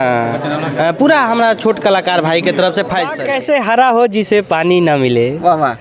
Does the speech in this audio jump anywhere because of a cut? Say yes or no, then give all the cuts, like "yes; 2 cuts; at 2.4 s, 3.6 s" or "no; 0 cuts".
yes; 1 cut; at 3.2 s